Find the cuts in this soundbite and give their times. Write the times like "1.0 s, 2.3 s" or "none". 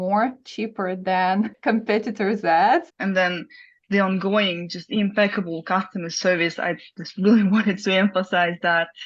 2.9 s